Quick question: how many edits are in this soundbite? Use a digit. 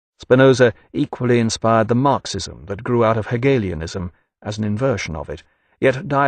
1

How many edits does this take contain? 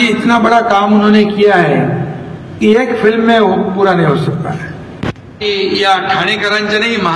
1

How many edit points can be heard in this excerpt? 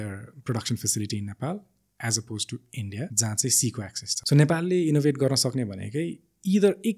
2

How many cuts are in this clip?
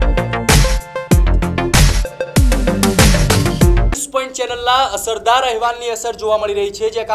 1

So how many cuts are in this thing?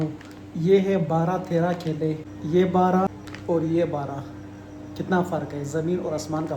1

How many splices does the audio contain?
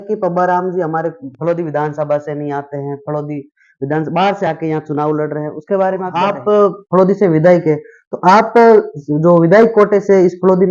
1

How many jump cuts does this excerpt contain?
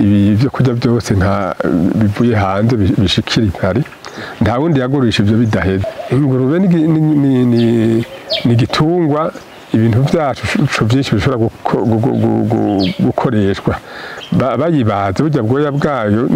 1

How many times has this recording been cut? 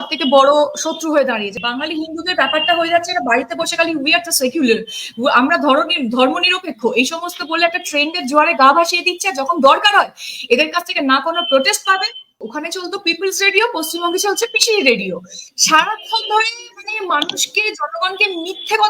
2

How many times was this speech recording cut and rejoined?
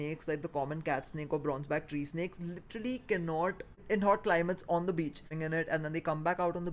2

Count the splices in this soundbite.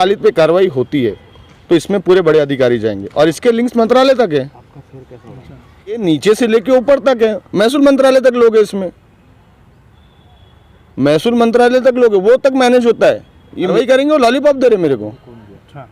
2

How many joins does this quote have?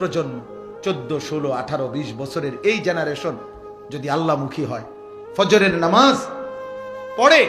0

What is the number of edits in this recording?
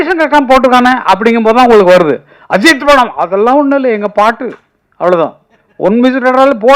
0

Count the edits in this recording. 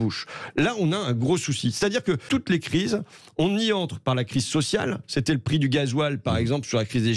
1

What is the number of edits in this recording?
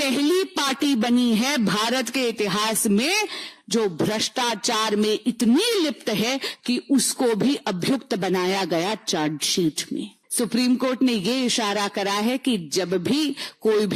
1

